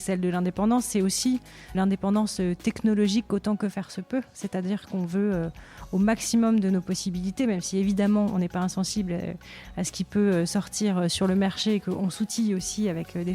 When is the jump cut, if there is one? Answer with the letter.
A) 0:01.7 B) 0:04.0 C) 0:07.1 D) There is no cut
A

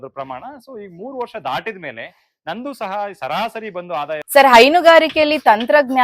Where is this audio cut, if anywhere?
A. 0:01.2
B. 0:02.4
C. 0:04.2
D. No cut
C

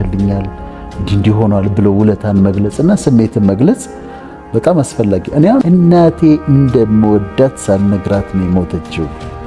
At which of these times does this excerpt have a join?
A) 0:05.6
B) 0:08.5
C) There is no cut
A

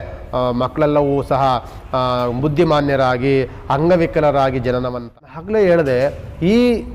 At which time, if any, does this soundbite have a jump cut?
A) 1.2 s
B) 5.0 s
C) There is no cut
B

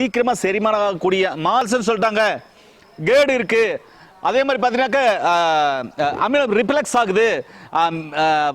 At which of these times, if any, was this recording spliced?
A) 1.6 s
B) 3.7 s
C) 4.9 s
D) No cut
A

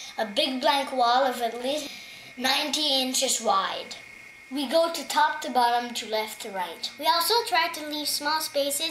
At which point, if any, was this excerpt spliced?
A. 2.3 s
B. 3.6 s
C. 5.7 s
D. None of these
C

